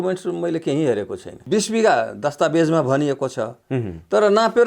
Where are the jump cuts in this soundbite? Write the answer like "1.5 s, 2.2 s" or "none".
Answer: 1.3 s